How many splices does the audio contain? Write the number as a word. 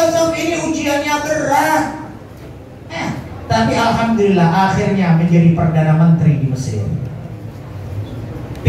zero